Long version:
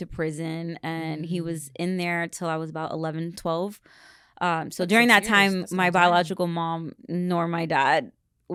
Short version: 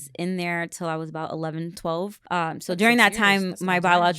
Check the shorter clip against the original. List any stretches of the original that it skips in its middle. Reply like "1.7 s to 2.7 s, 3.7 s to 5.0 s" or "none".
3.8 s to 4.3 s